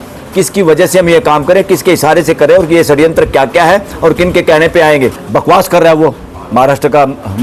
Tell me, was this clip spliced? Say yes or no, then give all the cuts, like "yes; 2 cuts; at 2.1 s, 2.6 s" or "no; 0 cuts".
yes; 1 cut; at 5.2 s